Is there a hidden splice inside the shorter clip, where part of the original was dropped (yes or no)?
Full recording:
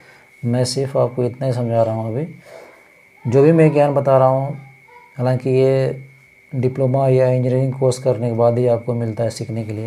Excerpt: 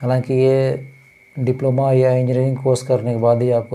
no